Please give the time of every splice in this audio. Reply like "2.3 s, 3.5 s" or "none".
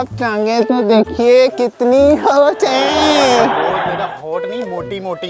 none